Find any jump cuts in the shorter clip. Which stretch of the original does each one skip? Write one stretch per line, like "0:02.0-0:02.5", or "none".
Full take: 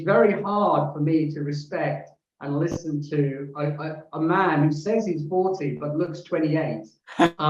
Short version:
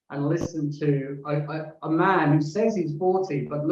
none